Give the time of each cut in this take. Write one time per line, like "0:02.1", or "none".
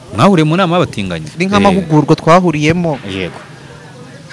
0:01.3